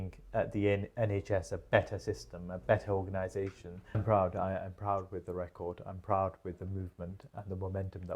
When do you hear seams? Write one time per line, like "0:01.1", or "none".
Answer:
0:04.0